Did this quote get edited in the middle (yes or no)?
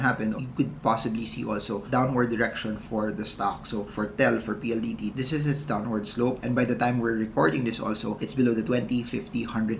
no